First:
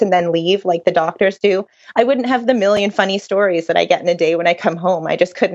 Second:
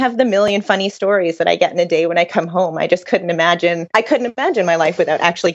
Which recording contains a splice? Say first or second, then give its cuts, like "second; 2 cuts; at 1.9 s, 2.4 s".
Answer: second; 1 cut; at 4.2 s